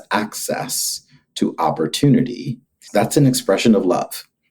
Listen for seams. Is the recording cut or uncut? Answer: cut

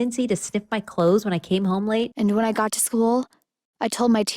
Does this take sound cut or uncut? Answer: cut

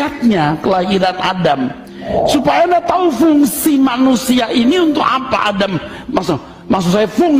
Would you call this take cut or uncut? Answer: uncut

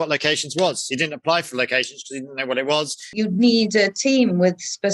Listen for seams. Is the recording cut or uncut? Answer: cut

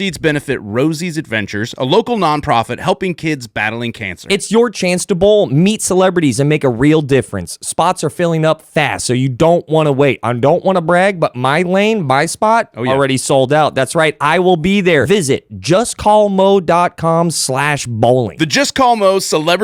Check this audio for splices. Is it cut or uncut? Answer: uncut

